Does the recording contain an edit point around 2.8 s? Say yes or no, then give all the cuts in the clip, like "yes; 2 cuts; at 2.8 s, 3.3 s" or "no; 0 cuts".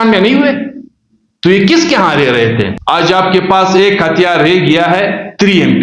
yes; 1 cut; at 2.8 s